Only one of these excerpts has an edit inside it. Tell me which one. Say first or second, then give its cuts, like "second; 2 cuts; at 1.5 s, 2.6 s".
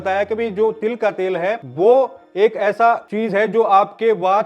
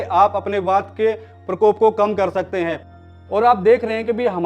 second; 1 cut; at 2.9 s